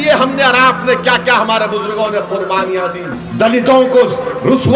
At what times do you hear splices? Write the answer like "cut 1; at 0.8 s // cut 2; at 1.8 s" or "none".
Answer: cut 1; at 3.2 s